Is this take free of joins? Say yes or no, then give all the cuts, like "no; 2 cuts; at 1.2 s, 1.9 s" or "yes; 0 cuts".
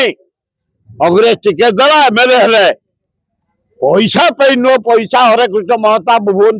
yes; 0 cuts